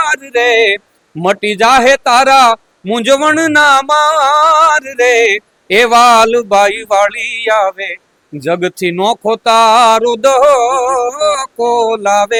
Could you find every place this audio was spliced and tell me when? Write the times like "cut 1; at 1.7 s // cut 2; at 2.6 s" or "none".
none